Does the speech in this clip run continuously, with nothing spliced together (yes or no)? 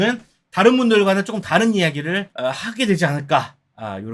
no